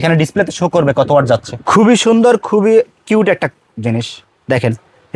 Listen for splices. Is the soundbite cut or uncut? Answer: cut